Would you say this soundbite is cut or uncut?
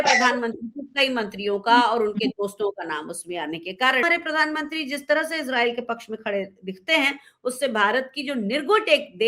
cut